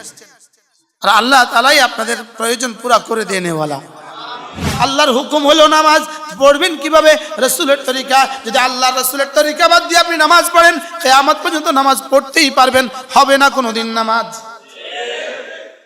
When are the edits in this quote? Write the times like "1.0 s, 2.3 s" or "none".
4.7 s